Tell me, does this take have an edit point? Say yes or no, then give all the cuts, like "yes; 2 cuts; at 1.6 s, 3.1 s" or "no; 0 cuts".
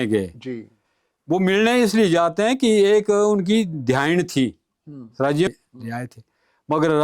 yes; 1 cut; at 5.5 s